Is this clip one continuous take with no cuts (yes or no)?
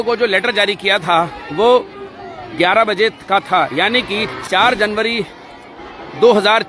no